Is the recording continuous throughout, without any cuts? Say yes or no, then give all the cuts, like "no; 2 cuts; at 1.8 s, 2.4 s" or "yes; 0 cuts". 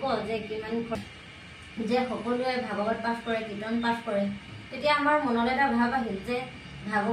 no; 1 cut; at 1.0 s